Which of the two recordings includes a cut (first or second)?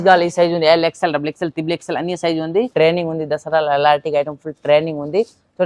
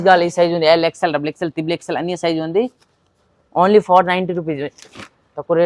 first